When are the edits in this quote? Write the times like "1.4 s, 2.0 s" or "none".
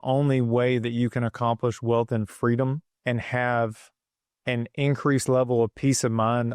2.9 s